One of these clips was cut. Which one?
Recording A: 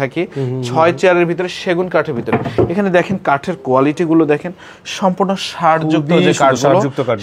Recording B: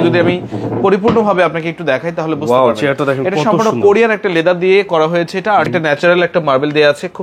B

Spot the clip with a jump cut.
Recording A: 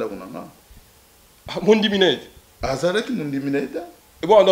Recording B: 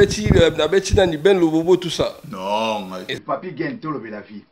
B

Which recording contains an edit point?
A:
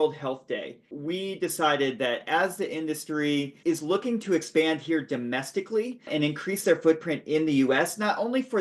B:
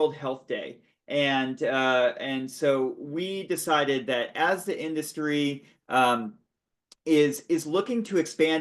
A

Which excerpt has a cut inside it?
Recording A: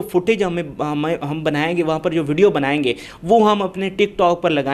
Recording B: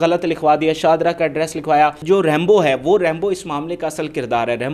B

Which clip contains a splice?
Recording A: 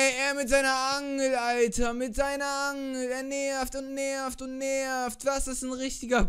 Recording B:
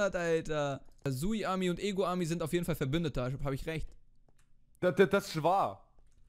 B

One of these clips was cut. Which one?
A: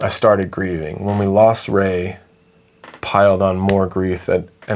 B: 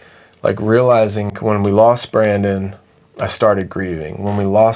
B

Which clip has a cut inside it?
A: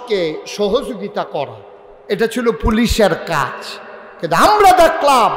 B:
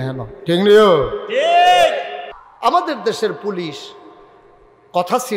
B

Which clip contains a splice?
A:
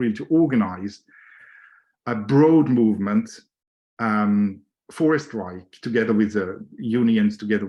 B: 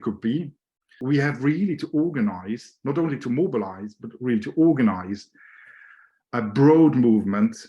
B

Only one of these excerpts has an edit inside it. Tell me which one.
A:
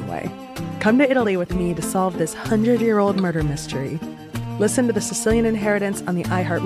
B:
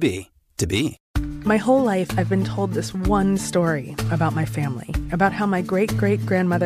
B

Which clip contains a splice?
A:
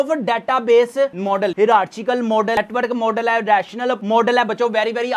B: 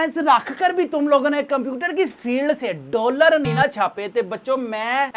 A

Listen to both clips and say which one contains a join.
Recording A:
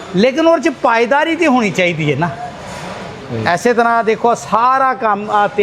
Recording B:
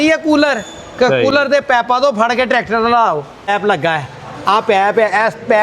B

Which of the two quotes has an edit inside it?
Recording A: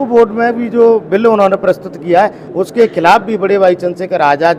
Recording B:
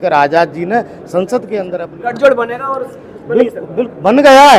B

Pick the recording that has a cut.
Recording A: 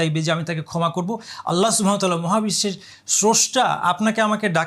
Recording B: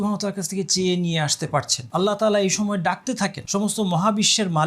B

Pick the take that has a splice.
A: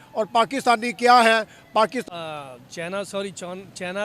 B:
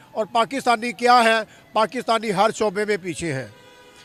A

